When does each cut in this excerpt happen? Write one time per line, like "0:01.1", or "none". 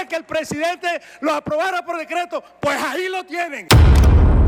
0:03.6